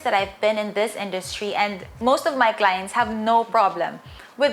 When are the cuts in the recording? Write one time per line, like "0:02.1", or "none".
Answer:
none